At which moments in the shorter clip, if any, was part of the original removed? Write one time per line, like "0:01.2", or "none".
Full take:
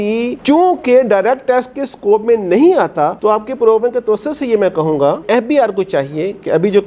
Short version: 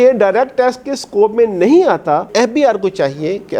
0:02.3